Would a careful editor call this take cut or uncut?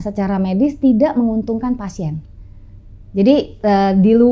uncut